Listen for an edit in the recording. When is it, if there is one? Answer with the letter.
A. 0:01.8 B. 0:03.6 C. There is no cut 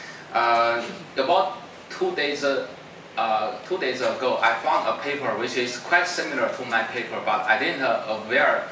C